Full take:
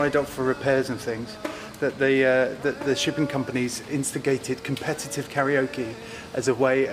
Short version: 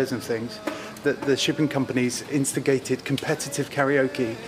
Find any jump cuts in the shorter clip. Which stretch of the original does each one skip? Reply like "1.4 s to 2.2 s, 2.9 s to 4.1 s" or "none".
1.7 s to 2.6 s

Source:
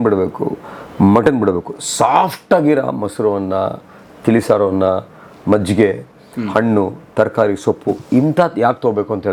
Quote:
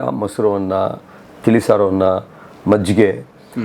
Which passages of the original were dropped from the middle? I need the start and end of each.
none

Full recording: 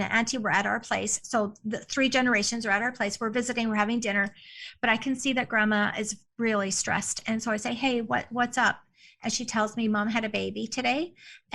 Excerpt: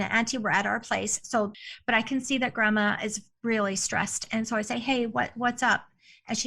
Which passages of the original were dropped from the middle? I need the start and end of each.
1.6 s to 4.5 s

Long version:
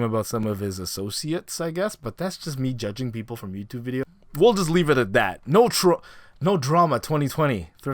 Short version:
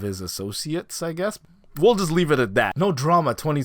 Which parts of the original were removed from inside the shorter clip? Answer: 2.1 s to 4.1 s, 5.3 s to 6.4 s

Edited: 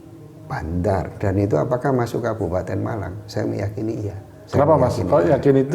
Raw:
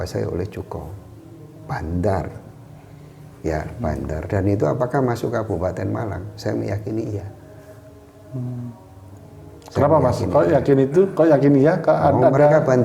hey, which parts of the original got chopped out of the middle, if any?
2.3 s to 4.2 s, 7.4 s to 9.5 s

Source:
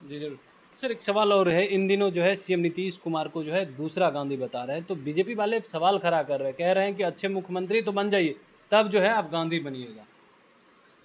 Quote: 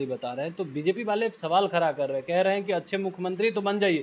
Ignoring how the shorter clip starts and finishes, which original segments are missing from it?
none

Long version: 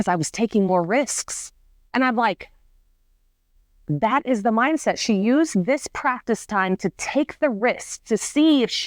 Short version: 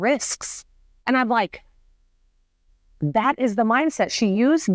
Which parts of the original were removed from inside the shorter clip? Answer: none

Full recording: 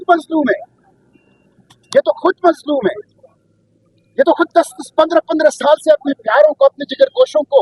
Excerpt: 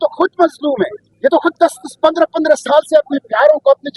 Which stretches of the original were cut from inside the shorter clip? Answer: 3.1 s to 4.0 s

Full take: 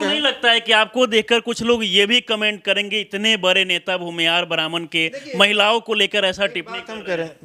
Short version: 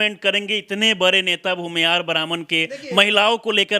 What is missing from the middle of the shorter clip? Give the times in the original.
none

